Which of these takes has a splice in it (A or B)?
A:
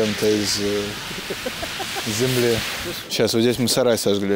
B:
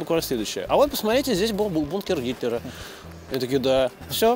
A